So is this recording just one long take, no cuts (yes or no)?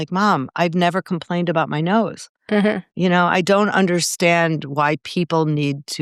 yes